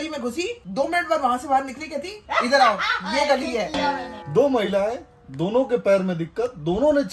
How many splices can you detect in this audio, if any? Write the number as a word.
one